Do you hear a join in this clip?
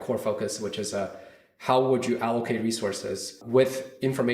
yes; 1 cut; at 3.4 s

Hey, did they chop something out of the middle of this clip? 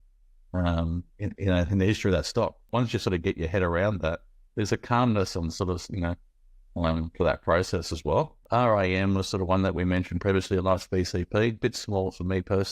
yes; 2 cuts; at 2.6 s, 8.4 s

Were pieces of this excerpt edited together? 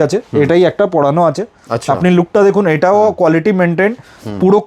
no; 0 cuts

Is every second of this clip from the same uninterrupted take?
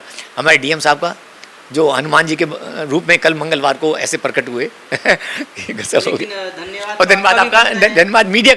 yes; 0 cuts

